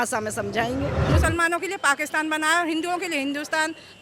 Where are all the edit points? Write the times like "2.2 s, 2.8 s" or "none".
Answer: 1.1 s